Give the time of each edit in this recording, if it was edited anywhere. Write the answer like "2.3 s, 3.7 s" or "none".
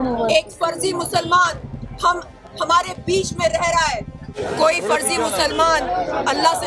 4.4 s